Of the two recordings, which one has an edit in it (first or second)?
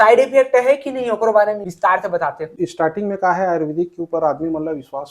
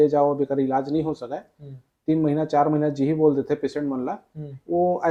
first